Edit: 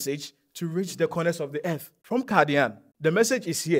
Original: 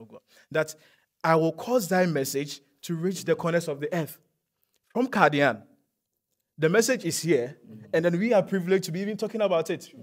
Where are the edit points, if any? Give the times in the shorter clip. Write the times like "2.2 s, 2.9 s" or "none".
1.9 s, 2.8 s